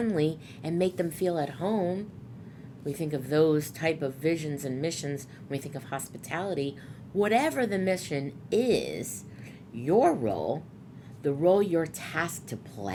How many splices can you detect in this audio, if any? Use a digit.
0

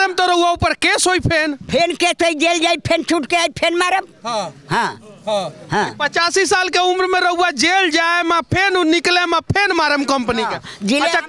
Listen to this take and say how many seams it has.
0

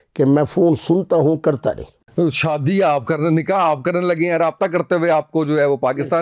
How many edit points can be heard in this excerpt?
1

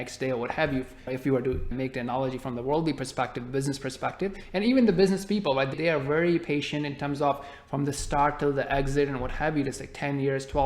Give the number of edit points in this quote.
3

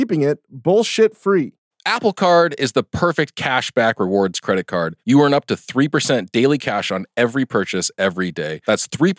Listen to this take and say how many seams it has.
1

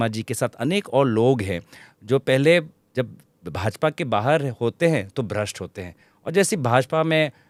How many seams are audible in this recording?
0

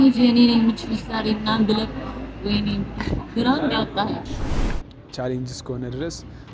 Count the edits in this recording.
1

